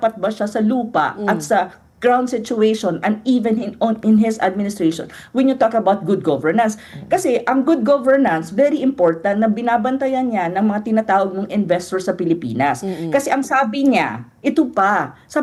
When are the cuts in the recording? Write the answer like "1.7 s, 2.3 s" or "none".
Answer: none